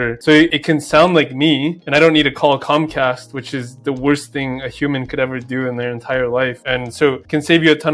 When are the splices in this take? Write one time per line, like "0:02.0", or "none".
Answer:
0:06.6